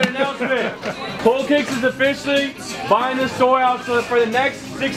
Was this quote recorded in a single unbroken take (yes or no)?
no